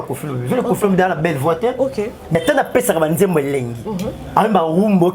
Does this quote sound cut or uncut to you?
uncut